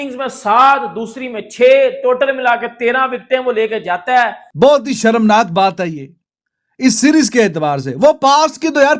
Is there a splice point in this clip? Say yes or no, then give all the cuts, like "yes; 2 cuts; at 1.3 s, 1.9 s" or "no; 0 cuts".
yes; 1 cut; at 4.4 s